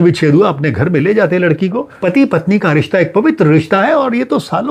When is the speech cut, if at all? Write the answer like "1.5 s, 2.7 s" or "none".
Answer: 2.0 s

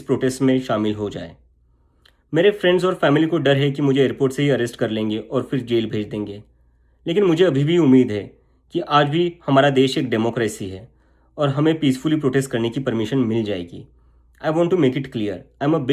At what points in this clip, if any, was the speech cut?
none

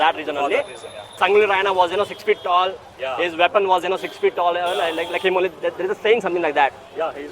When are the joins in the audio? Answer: 1.1 s

